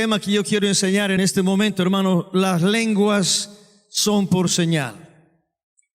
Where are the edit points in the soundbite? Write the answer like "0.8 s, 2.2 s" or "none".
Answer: 1.2 s